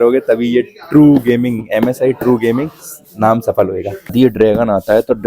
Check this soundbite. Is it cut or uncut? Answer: cut